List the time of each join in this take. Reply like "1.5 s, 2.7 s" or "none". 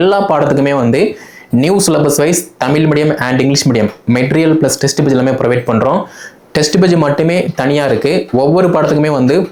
none